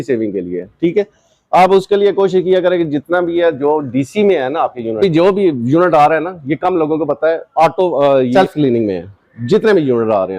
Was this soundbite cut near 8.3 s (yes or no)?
yes